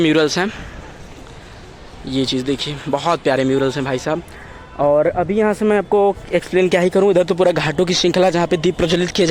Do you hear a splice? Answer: no; 0 cuts

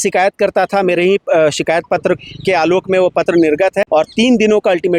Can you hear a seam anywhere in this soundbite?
yes; 1 cut; at 3.8 s

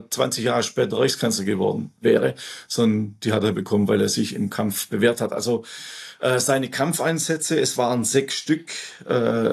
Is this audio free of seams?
yes; 0 cuts

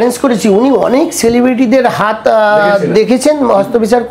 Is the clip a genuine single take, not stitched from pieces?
yes; 0 cuts

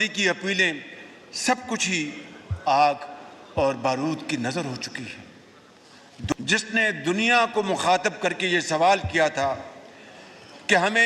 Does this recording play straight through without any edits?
no; 1 cut; at 6.3 s

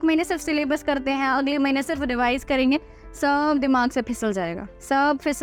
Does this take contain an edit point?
no; 0 cuts

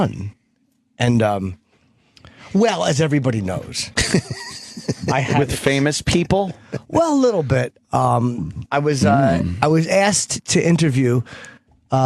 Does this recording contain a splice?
yes; 1 cut; at 9.8 s

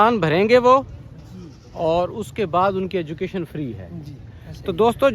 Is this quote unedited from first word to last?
yes; 0 cuts

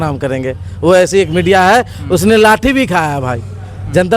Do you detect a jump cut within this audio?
no; 0 cuts

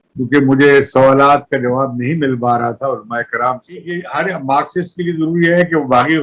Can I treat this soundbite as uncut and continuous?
no; 1 cut; at 4.1 s

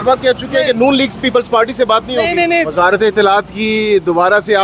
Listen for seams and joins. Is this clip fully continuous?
no; 1 cut; at 2.7 s

